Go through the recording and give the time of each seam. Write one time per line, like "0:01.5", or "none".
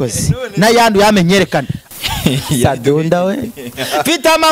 0:01.8